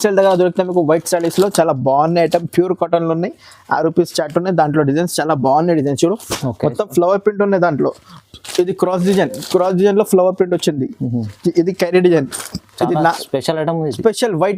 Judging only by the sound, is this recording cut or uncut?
uncut